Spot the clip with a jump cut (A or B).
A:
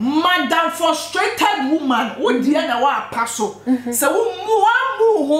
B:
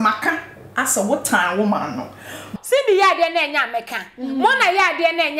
B